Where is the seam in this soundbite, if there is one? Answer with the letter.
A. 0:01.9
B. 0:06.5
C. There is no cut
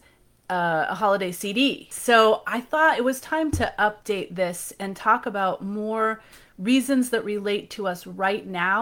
A